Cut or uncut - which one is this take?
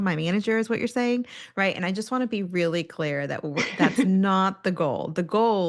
uncut